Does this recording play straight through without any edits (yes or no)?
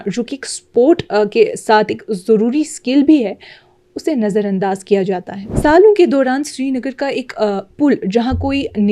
no